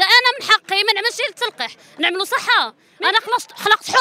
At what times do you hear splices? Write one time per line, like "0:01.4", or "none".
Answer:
0:02.8